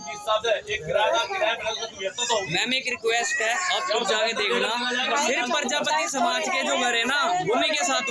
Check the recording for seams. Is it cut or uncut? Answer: uncut